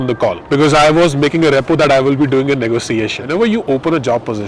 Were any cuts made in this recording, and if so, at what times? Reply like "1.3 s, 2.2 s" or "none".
3.2 s